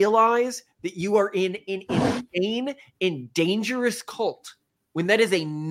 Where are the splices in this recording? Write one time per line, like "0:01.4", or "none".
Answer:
none